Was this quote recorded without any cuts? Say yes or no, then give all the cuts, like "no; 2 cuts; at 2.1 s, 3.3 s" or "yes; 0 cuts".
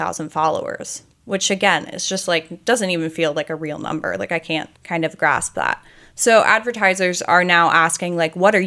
no; 1 cut; at 4.8 s